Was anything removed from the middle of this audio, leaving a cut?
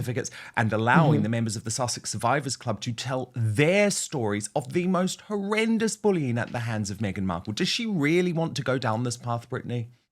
no; 0 cuts

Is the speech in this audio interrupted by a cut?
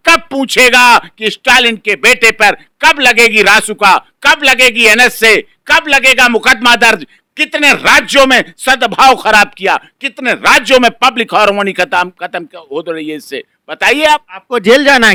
no; 0 cuts

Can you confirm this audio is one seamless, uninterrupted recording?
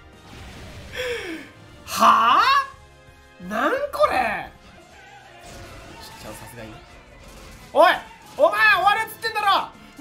no; 1 cut; at 4.8 s

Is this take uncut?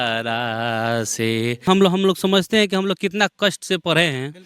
no; 1 cut; at 1.7 s

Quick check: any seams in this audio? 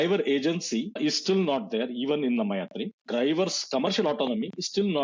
yes; 2 cuts; at 1.0 s, 3.0 s

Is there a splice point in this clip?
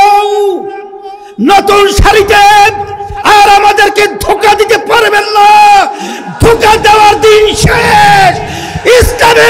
no; 0 cuts

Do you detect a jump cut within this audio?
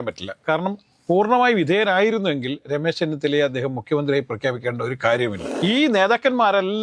yes; 1 cut; at 5.5 s

